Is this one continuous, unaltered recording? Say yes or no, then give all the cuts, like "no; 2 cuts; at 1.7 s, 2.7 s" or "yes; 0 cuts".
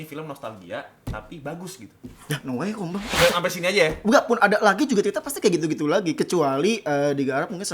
no; 1 cut; at 3.1 s